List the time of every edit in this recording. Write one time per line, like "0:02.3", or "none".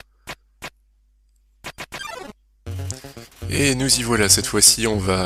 none